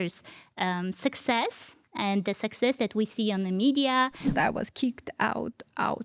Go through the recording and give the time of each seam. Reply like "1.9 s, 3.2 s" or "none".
4.3 s